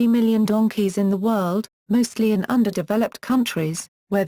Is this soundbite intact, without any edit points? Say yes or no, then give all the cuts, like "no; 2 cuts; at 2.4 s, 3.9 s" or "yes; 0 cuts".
no; 1 cut; at 2.2 s